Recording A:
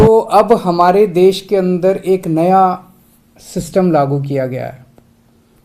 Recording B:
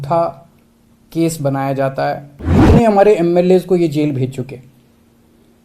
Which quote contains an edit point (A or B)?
B